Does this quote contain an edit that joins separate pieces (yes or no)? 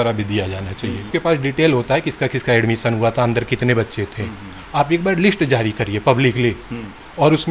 yes